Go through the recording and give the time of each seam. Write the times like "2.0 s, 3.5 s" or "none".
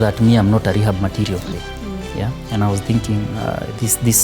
1.5 s